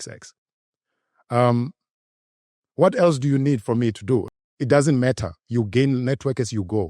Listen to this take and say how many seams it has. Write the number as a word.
one